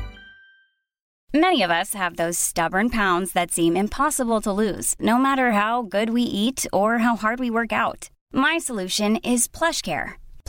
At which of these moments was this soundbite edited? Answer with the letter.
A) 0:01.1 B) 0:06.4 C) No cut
A